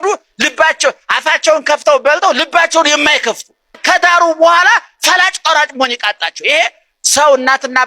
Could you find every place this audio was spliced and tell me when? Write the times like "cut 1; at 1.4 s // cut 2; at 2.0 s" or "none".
cut 1; at 3.8 s